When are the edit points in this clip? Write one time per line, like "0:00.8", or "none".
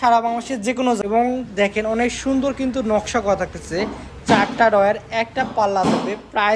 0:01.0